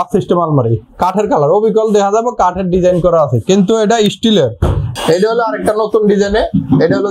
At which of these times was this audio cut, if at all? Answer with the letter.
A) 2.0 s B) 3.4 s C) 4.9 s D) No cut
C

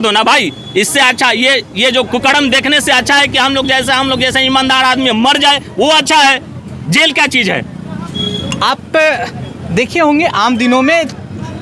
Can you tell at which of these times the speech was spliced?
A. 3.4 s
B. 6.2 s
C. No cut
C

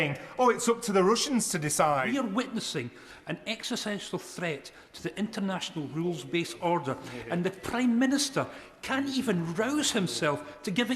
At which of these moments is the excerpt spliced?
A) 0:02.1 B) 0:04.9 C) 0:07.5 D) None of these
A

